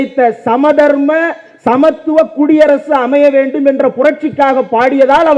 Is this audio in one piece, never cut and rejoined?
yes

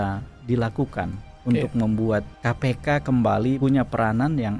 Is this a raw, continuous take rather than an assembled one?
no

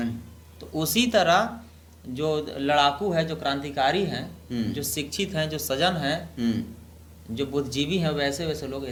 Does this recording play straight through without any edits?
yes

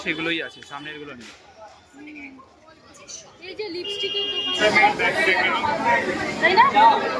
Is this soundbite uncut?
no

